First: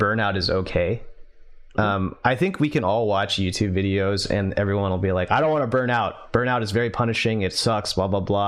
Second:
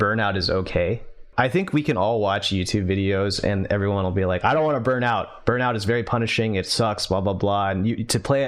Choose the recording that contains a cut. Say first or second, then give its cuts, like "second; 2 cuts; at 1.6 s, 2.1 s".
second; 1 cut; at 1.3 s